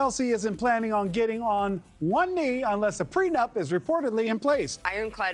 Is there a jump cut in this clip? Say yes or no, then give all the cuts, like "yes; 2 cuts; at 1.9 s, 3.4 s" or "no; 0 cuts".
no; 0 cuts